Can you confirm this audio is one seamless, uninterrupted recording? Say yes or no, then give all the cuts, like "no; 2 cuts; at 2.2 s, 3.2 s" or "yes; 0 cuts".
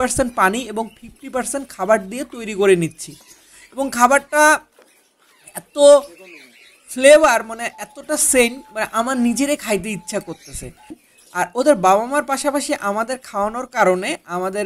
no; 1 cut; at 10.9 s